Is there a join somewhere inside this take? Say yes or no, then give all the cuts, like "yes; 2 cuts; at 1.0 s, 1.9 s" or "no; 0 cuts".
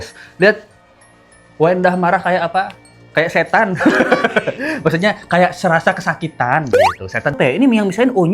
yes; 1 cut; at 7.3 s